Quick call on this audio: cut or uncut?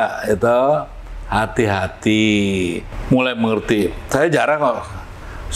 cut